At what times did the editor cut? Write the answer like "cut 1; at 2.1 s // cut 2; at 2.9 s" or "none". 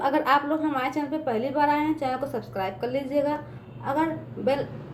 none

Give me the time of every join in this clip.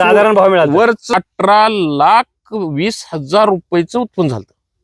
cut 1; at 1.1 s

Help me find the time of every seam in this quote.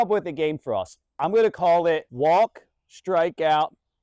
cut 1; at 1.0 s // cut 2; at 2.1 s

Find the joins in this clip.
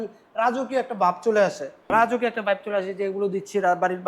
cut 1; at 1.8 s

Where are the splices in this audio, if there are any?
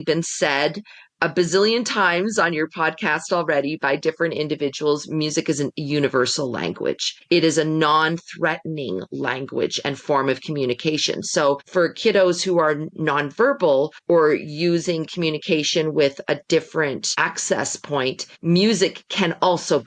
cut 1; at 7.1 s // cut 2; at 11.6 s // cut 3; at 14.0 s // cut 4; at 17.1 s // cut 5; at 18.3 s

